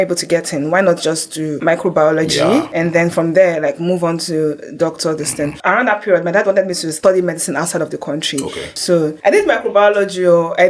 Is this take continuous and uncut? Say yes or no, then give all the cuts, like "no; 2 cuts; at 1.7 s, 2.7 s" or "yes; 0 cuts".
no; 5 cuts; at 1.6 s, 2.7 s, 5.6 s, 6.9 s, 8.8 s